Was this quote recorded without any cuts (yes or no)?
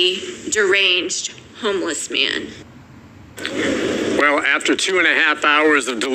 no